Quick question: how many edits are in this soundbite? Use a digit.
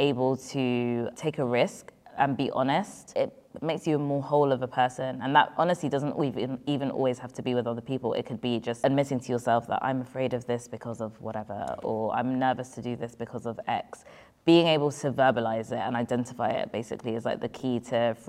3